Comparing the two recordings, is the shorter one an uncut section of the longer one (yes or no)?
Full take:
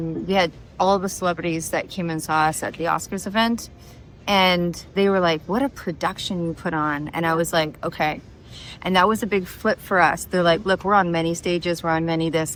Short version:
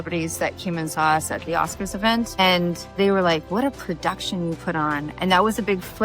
no